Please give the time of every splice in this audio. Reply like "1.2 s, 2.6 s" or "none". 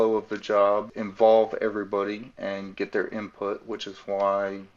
1.0 s